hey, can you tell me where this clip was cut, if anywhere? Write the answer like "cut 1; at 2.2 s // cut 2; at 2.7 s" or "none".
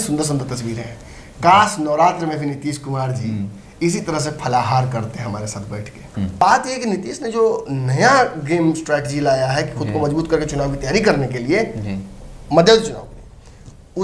cut 1; at 6.3 s

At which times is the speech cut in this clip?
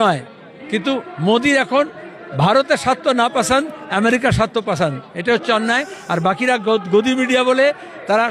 none

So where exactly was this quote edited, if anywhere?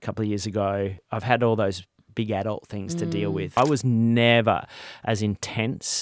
cut 1; at 1.1 s // cut 2; at 3.6 s

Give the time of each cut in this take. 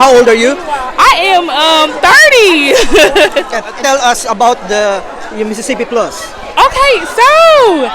cut 1; at 3.6 s

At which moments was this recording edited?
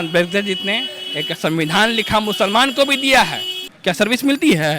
cut 1; at 3.7 s

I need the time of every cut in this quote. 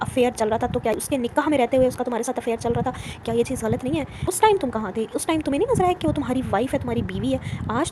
cut 1; at 0.9 s // cut 2; at 4.1 s

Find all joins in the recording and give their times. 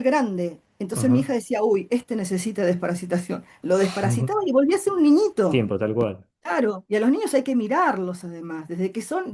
cut 1; at 5.5 s

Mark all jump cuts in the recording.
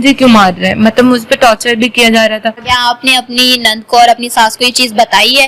cut 1; at 2.7 s

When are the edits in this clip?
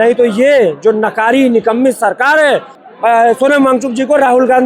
cut 1; at 2.7 s

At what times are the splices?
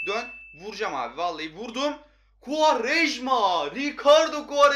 none

